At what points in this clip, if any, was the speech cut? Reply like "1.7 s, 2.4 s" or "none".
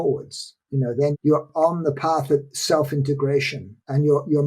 1.1 s